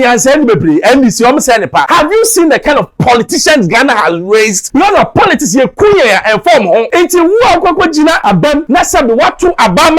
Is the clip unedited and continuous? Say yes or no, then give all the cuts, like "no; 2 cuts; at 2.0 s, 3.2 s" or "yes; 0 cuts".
no; 4 cuts; at 1.9 s, 4.6 s, 6.9 s, 8.4 s